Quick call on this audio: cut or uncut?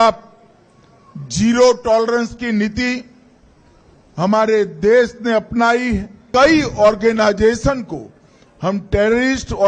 cut